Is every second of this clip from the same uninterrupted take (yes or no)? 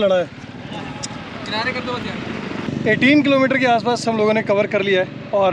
no